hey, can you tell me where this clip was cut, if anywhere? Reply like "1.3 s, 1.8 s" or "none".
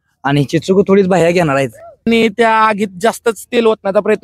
2.1 s